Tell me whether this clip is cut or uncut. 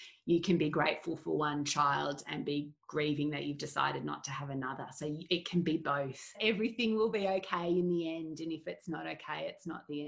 cut